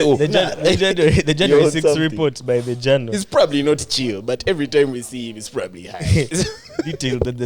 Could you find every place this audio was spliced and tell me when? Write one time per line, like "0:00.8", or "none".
0:06.3